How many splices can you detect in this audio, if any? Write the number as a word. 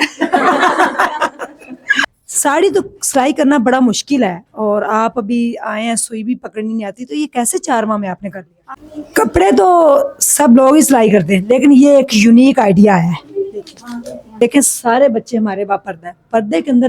three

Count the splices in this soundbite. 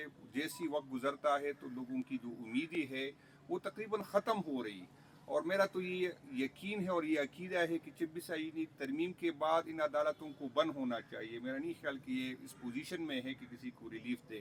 zero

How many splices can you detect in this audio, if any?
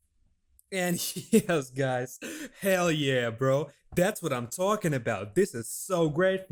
zero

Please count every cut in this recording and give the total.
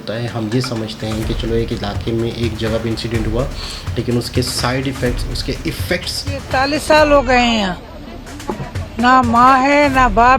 one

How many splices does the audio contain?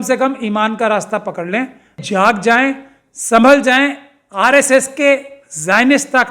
one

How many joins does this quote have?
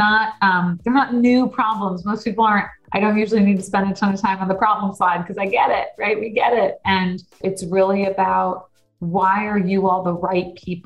two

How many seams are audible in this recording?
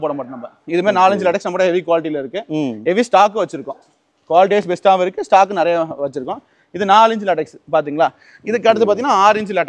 zero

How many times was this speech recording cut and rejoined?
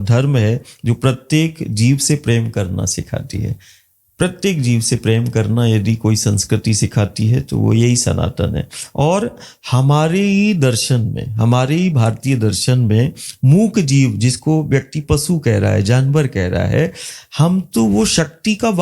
zero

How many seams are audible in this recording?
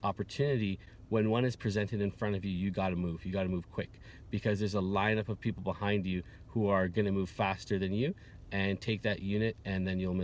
zero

